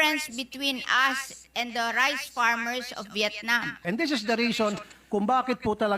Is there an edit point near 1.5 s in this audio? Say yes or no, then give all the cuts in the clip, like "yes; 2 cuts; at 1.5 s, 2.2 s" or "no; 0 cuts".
no; 1 cut; at 3.8 s